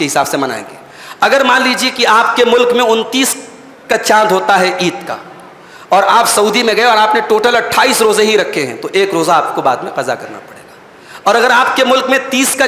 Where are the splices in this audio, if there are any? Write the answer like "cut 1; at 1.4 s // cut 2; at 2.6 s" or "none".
none